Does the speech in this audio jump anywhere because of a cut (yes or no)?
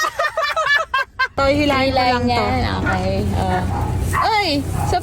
yes